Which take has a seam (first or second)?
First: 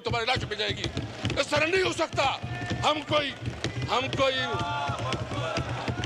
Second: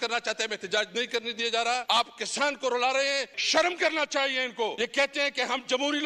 second